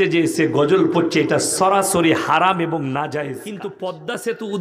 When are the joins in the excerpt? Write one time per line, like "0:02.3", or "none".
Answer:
0:03.6